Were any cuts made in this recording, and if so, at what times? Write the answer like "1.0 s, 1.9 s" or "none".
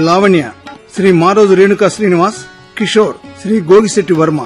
2.8 s